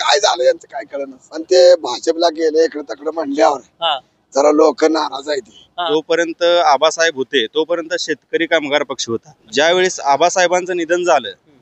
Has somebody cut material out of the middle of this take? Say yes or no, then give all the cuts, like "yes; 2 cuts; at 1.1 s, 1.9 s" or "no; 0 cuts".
yes; 3 cuts; at 1.4 s, 5.8 s, 9.4 s